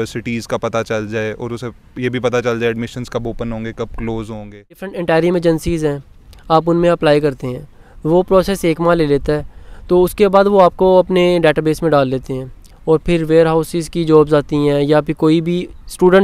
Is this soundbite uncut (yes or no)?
no